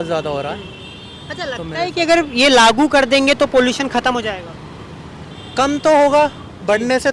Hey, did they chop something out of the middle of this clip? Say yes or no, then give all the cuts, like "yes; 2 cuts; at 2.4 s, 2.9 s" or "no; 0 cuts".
no; 0 cuts